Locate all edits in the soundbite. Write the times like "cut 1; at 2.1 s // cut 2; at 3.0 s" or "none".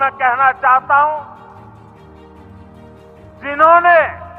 cut 1; at 1.9 s // cut 2; at 3.4 s